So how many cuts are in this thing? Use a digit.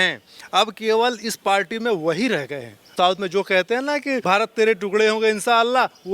2